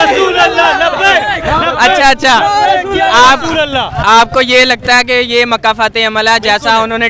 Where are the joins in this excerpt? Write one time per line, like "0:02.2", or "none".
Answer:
none